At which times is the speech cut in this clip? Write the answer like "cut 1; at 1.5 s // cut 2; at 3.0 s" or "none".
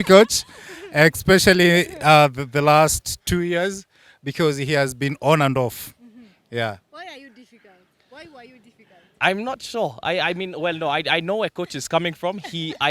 none